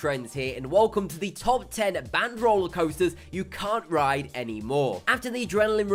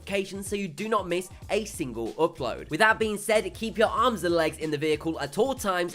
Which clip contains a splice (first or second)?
second